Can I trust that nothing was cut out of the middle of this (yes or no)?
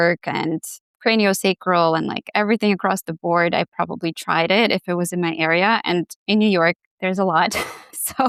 yes